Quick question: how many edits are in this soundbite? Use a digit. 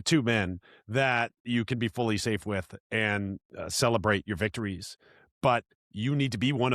2